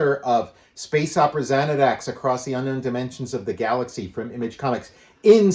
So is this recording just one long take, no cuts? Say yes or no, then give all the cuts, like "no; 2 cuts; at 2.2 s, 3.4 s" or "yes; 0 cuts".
yes; 0 cuts